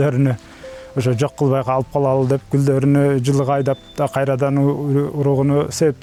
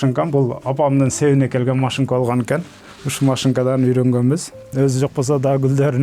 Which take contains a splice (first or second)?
second